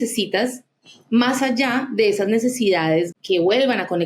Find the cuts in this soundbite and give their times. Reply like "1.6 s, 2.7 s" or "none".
3.1 s